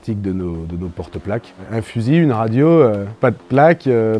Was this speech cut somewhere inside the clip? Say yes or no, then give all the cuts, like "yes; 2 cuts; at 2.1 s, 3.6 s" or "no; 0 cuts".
yes; 2 cuts; at 1.6 s, 3.1 s